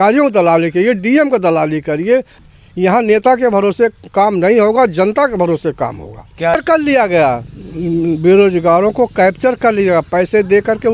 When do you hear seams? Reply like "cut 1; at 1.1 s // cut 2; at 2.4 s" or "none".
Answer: cut 1; at 2.4 s // cut 2; at 6.5 s